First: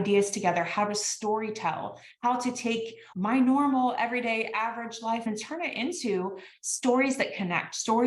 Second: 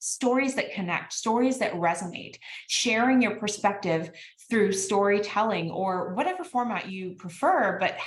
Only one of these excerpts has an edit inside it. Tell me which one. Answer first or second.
first